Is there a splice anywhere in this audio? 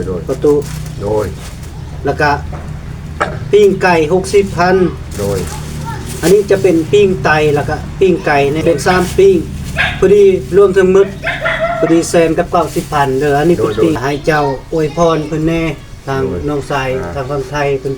yes; 2 cuts; at 8.6 s, 14.0 s

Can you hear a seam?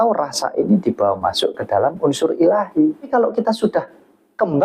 yes; 1 cut; at 3.1 s

